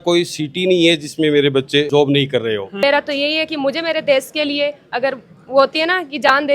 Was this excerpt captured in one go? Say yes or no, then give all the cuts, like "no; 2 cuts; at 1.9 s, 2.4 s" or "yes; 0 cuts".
no; 1 cut; at 2.8 s